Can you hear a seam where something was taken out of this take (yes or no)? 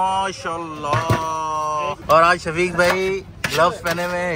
yes